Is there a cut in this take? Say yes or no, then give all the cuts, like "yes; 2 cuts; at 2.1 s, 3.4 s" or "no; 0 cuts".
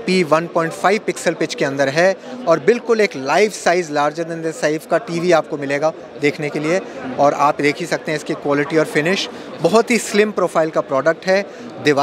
no; 0 cuts